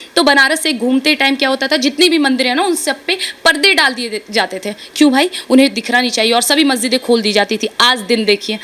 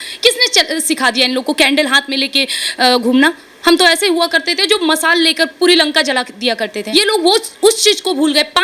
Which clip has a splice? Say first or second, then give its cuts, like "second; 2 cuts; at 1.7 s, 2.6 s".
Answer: second; 1 cut; at 6.8 s